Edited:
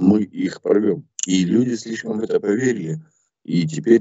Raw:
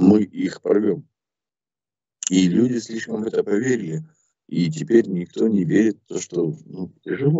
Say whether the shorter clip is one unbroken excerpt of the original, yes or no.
no